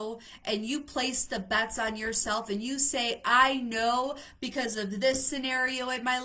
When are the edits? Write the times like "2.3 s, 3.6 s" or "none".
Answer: none